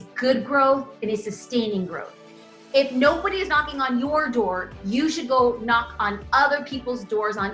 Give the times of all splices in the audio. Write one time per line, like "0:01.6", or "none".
0:02.3